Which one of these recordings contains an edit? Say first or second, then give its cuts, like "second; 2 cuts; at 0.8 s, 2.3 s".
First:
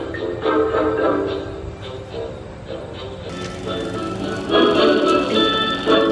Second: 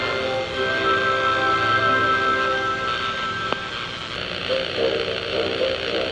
second; 1 cut; at 4.1 s